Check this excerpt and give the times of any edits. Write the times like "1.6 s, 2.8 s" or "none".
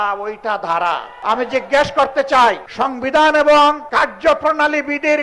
1.1 s, 2.7 s, 3.8 s